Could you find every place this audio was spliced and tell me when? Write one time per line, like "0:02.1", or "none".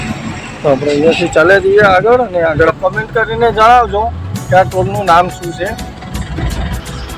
0:02.7